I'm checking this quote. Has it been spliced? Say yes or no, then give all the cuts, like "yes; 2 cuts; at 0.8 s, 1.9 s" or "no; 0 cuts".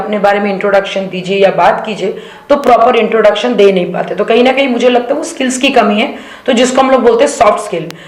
no; 0 cuts